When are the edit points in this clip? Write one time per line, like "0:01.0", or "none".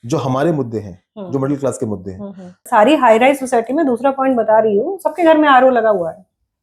0:02.7